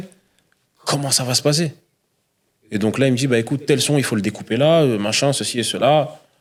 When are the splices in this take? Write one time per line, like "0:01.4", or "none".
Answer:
none